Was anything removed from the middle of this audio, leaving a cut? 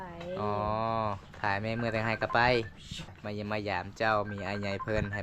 yes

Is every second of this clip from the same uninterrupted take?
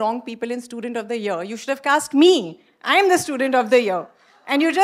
yes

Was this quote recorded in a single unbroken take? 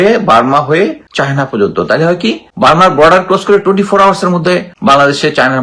no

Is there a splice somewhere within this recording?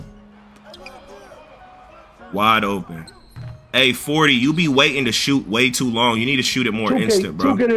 no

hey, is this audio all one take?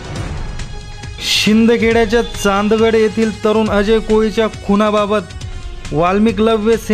no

